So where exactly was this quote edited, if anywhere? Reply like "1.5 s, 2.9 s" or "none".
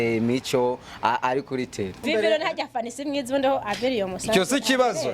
2.0 s